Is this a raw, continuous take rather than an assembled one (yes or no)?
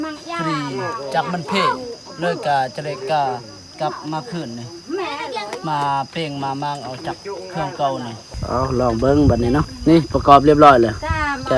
no